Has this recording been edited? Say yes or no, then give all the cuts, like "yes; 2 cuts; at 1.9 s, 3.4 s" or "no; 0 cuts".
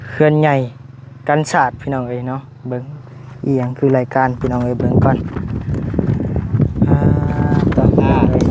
no; 0 cuts